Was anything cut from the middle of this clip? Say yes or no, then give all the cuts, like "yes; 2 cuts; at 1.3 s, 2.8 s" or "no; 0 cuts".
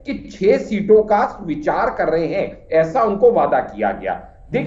no; 0 cuts